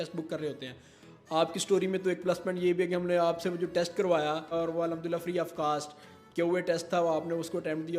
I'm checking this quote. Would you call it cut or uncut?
cut